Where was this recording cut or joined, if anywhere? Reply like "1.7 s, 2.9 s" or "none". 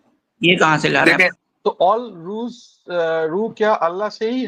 1.4 s